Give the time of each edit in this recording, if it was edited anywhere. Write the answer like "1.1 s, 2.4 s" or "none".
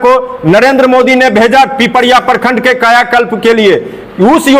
none